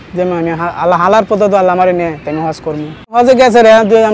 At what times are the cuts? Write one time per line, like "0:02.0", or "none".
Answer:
0:03.1